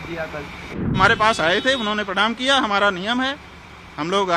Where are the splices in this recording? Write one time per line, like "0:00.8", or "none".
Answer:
0:00.9